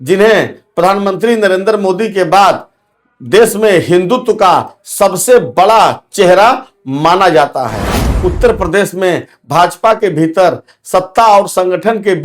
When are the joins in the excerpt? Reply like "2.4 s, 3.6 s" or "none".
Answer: 8.1 s